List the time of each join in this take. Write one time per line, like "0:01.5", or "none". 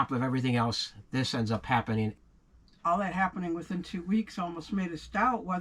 0:02.2